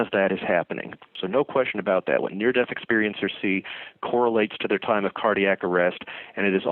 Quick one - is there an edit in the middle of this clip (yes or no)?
yes